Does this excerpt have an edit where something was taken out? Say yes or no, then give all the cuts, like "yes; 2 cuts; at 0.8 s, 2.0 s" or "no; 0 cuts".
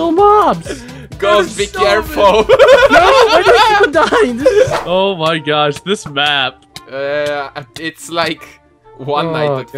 yes; 1 cut; at 4.8 s